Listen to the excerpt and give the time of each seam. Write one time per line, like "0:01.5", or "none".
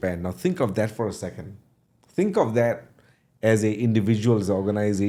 none

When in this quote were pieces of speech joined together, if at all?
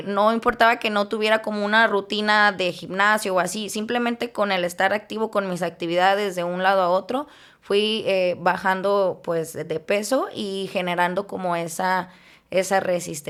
none

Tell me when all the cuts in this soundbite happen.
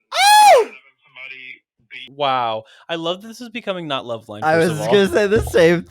0:02.0

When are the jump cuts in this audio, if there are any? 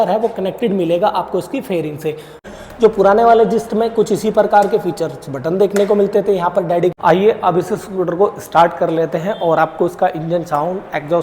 0:02.4
0:06.9

